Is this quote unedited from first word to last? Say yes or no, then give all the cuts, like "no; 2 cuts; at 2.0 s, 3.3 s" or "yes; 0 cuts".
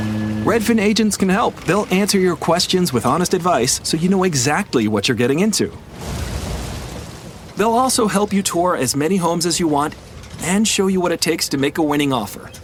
yes; 0 cuts